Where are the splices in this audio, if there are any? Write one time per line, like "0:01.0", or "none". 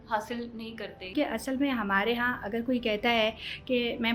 0:01.1